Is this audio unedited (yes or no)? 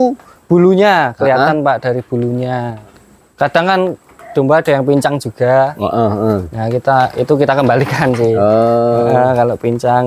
no